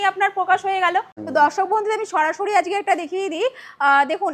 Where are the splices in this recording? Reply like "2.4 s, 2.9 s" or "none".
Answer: 1.2 s